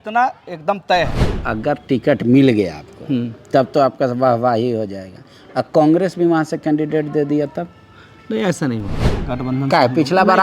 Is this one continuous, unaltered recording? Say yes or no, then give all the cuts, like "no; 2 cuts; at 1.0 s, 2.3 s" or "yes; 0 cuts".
no; 1 cut; at 1.3 s